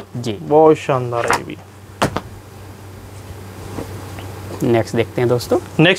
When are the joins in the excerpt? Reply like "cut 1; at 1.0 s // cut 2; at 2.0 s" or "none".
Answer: none